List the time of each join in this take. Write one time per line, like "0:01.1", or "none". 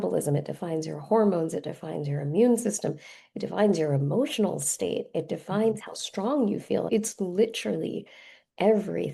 0:06.9